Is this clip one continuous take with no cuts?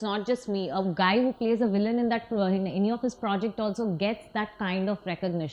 yes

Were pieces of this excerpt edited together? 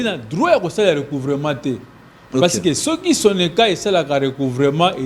no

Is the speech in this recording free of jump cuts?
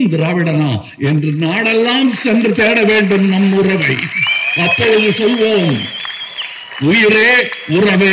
yes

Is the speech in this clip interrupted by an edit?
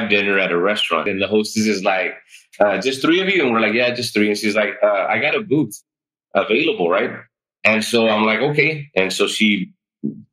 yes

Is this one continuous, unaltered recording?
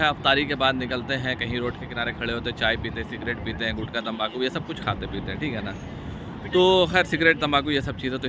yes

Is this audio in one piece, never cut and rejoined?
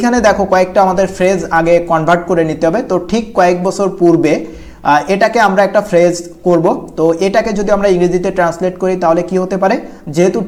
yes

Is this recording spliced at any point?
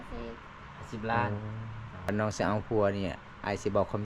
yes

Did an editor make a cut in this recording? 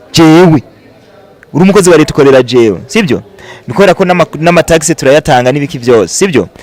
no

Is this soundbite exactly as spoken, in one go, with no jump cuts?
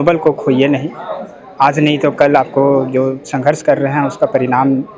yes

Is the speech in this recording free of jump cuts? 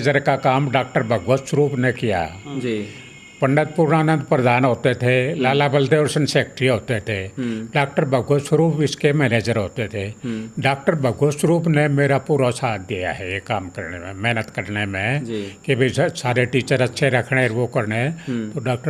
yes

